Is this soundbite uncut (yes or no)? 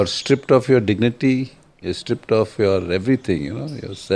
no